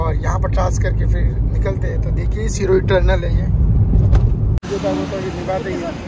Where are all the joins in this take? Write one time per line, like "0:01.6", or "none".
0:04.7